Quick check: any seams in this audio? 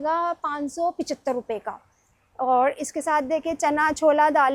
no; 0 cuts

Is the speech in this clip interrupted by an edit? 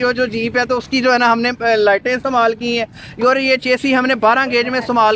no; 0 cuts

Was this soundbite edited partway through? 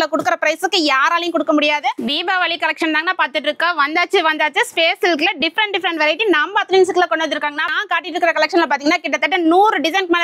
yes; 2 cuts; at 2.0 s, 7.7 s

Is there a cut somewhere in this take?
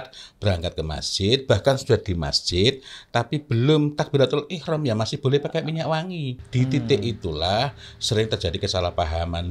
yes; 1 cut; at 6.3 s

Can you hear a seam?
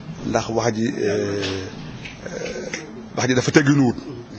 no; 0 cuts

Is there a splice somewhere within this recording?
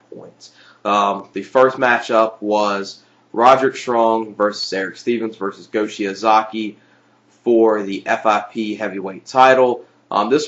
no; 0 cuts

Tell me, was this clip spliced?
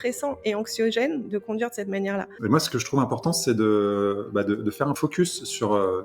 yes; 2 cuts; at 2.3 s, 4.9 s

